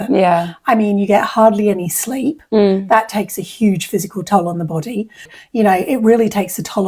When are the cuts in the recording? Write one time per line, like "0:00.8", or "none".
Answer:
0:05.2

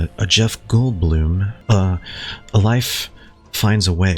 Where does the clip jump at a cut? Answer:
0:01.5

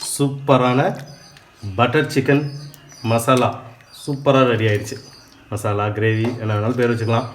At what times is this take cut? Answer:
none

